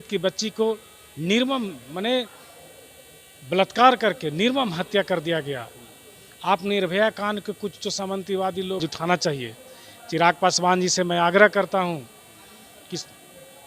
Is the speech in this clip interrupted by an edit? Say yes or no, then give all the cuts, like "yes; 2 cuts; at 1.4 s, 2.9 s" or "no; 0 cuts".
yes; 1 cut; at 8.8 s